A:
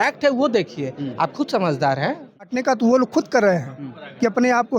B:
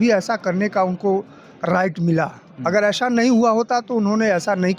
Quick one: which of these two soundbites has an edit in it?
A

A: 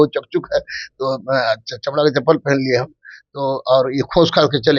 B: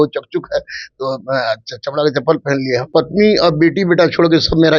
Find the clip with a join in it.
B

